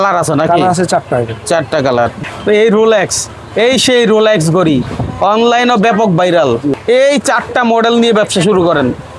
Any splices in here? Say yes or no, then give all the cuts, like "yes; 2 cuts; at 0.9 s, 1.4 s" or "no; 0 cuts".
yes; 2 cuts; at 2.3 s, 6.7 s